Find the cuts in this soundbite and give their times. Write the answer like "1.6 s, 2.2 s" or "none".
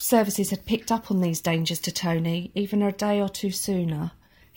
none